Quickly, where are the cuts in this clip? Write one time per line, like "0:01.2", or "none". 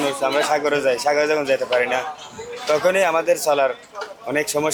none